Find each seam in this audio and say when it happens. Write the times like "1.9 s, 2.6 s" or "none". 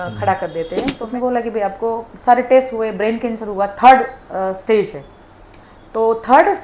1.0 s